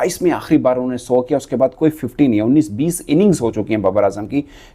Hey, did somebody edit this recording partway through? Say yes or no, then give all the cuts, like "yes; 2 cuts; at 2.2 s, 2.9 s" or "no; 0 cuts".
no; 0 cuts